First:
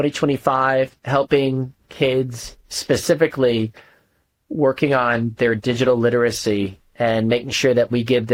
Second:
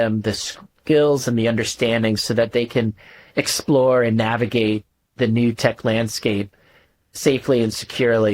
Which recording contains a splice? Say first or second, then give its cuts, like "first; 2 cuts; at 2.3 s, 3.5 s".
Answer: second; 1 cut; at 7.1 s